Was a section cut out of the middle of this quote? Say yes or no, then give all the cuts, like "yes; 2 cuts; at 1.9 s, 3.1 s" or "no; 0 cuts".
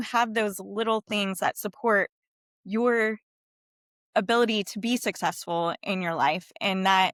no; 0 cuts